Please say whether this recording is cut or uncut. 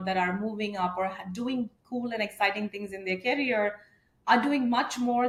uncut